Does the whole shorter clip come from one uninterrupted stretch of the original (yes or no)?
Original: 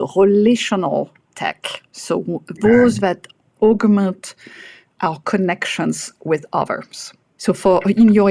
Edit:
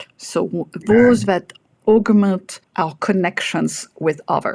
no